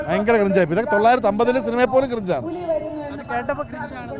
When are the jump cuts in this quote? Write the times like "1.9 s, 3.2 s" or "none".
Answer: none